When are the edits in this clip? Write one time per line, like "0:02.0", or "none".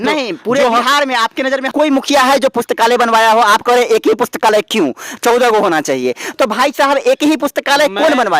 0:01.5